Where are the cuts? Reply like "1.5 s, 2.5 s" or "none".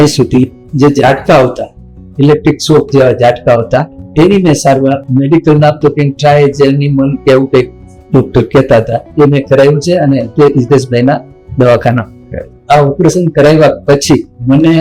none